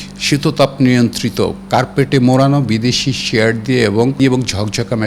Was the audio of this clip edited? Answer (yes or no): yes